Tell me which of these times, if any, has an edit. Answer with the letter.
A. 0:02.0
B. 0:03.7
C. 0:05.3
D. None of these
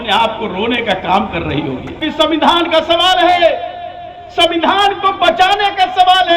A